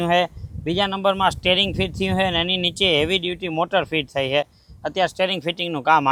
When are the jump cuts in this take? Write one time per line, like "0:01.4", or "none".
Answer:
none